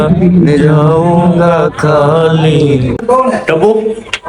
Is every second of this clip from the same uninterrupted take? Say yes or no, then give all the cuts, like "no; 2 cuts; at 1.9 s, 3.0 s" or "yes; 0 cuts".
no; 1 cut; at 3.0 s